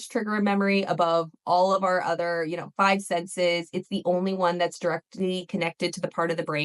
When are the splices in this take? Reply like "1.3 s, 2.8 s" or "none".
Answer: none